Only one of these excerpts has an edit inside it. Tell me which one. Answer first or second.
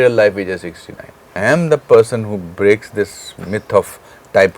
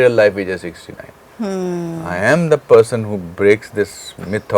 first